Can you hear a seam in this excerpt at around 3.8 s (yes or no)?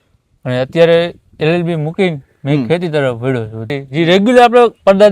yes